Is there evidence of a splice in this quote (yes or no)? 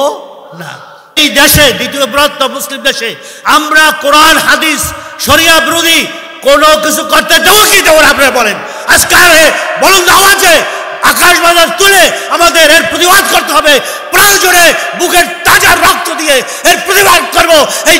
yes